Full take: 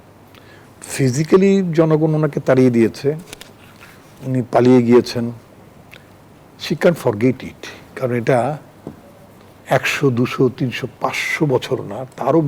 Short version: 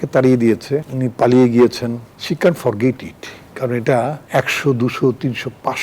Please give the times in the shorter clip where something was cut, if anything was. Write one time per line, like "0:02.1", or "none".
0:00.9
0:02.1
0:04.2